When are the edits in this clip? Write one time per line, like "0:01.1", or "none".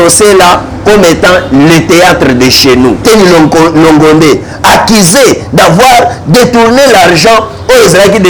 0:03.0